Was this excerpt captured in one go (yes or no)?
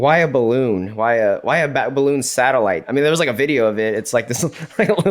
no